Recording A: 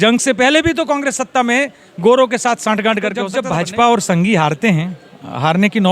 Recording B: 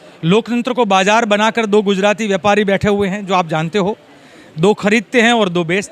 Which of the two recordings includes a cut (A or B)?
A